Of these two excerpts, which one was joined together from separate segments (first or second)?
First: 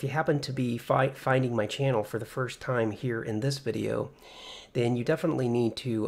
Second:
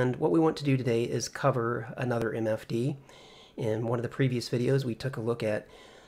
second